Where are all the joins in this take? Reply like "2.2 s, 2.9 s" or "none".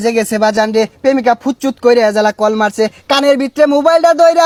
none